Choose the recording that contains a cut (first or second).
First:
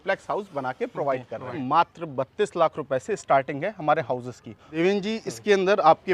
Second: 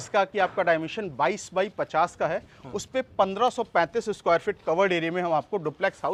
first